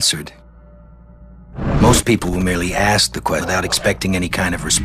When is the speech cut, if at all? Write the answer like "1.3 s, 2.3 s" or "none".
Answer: 3.4 s